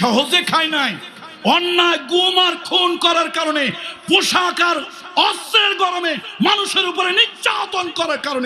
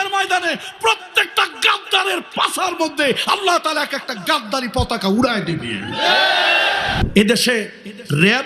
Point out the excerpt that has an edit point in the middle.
second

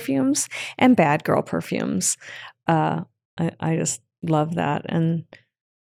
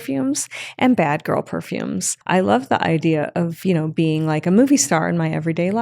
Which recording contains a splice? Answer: second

